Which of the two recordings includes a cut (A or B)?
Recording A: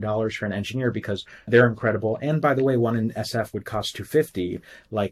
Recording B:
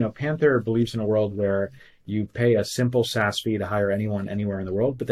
A